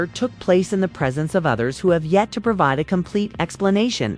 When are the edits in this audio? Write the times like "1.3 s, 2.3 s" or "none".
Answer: none

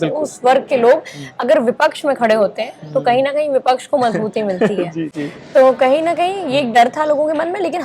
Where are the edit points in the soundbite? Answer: none

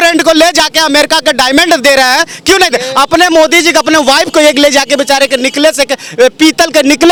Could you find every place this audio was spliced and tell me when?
none

